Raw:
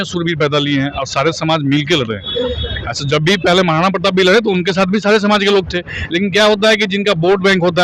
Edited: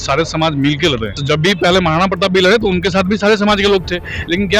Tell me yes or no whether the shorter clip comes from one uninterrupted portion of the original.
no